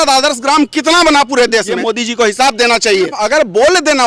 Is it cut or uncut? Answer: cut